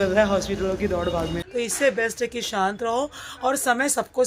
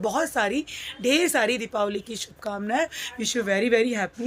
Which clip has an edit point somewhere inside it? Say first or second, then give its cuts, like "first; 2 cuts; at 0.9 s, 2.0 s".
first; 1 cut; at 1.4 s